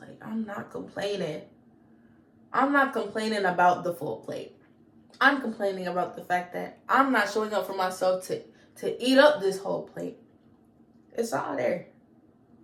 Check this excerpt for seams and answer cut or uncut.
uncut